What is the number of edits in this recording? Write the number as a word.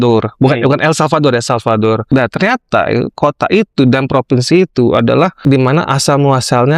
two